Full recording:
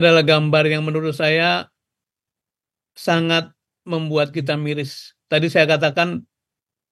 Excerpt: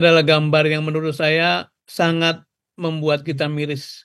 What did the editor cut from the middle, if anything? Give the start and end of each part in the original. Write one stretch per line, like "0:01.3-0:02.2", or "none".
0:01.8-0:02.9